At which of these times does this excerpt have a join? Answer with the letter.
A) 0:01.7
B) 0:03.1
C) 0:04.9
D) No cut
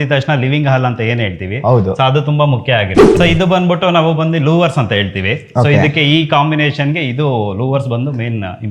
B